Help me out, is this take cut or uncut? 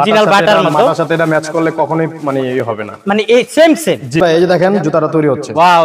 cut